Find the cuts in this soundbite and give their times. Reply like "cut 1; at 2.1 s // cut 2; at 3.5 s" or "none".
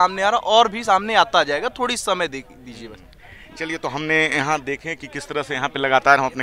none

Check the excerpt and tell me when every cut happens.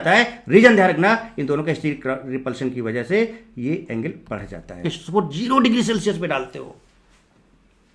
cut 1; at 5.0 s

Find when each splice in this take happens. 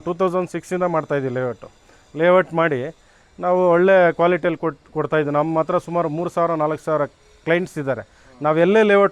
none

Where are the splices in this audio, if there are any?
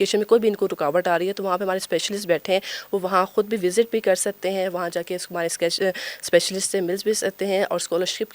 none

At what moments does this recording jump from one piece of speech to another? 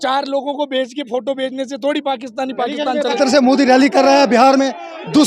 cut 1; at 3.2 s

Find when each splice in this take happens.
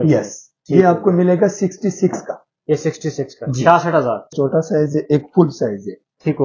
cut 1; at 4.3 s

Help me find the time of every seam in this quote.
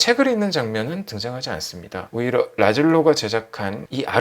cut 1; at 2.1 s

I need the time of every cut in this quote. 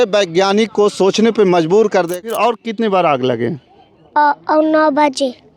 cut 1; at 2.2 s

